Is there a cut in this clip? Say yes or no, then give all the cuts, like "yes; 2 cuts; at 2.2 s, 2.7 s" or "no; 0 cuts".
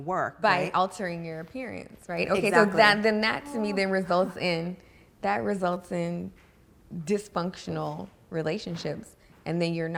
no; 0 cuts